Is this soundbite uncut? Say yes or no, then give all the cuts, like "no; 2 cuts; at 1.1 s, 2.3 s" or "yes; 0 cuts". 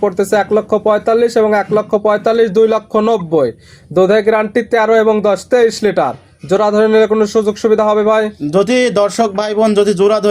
yes; 0 cuts